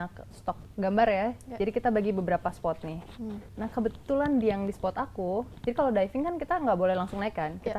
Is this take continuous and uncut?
no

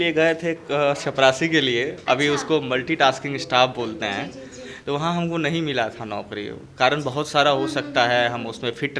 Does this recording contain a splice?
no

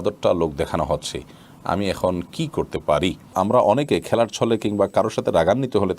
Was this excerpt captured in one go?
no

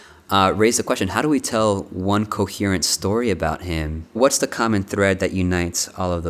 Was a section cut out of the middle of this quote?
yes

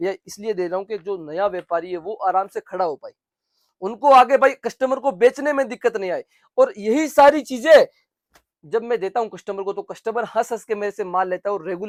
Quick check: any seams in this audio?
no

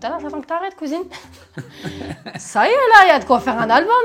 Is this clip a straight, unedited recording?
yes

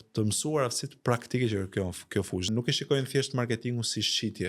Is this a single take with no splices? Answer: no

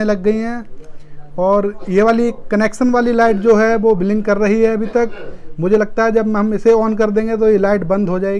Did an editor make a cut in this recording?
no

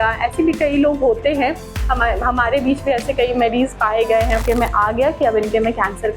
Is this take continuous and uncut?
no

